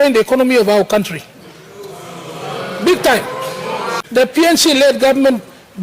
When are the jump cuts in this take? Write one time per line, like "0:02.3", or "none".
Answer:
0:04.0